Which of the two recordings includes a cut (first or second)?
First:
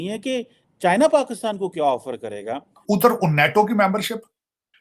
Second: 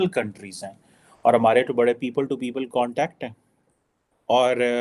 first